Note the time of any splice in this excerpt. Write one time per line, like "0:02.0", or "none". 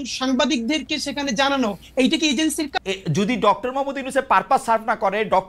0:02.7